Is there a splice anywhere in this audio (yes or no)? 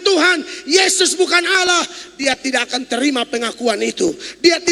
no